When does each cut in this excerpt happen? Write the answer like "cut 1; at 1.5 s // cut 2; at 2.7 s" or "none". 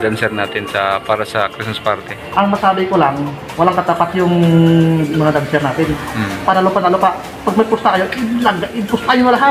none